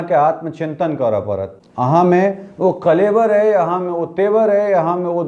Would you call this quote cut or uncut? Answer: cut